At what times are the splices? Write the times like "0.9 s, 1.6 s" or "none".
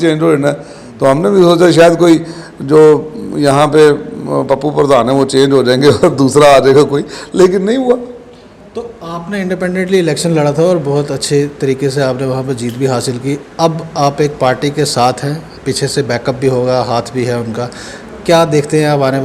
none